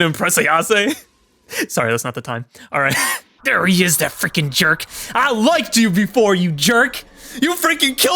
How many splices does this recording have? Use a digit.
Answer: 1